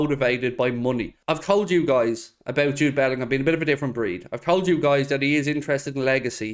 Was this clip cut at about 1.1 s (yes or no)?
yes